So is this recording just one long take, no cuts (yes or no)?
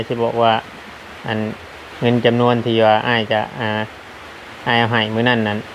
yes